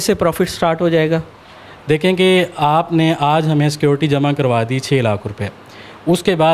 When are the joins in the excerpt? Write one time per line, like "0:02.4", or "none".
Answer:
none